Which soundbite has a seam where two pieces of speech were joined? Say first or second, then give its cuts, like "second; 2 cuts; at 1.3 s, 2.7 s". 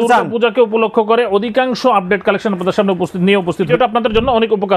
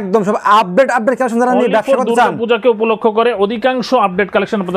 first; 1 cut; at 3.7 s